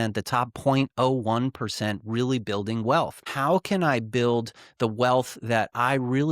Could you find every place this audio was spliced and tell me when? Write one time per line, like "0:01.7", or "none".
0:03.3